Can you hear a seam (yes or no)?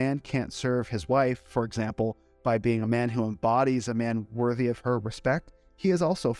no